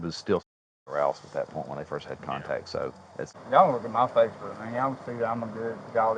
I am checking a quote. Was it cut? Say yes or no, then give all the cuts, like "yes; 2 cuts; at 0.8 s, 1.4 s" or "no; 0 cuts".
yes; 1 cut; at 3.4 s